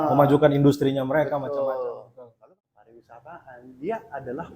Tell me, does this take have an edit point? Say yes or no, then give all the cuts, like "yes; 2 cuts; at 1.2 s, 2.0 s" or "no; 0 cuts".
yes; 1 cut; at 2.3 s